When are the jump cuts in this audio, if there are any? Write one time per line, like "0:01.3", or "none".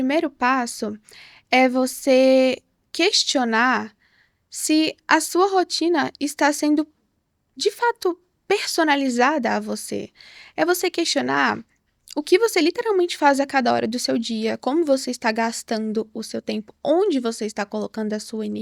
none